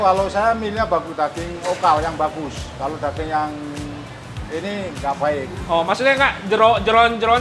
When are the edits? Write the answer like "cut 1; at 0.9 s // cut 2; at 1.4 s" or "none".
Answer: none